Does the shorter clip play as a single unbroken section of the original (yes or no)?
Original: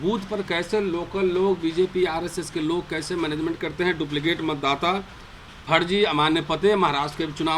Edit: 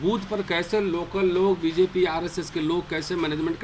yes